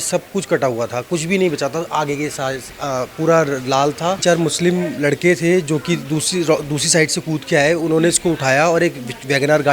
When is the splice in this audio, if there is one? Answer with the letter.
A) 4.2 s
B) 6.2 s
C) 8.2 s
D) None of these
A